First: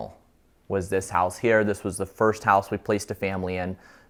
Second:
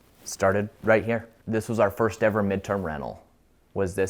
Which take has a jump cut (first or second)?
second